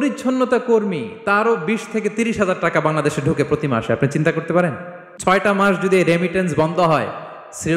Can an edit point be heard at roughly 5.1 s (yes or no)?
yes